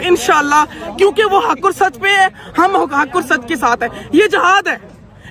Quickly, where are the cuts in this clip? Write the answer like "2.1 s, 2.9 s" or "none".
none